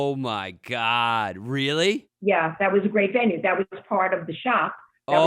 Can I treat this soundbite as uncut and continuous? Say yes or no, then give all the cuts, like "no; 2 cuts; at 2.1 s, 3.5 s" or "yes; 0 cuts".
no; 1 cut; at 2.1 s